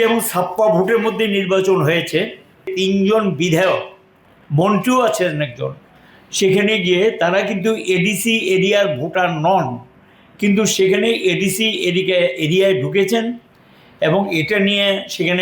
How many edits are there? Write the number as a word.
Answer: one